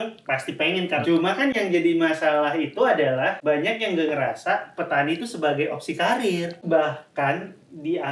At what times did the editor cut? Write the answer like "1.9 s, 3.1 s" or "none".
1.0 s, 3.4 s, 6.6 s